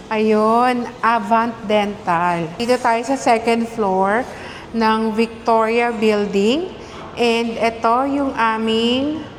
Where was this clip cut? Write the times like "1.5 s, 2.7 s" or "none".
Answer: none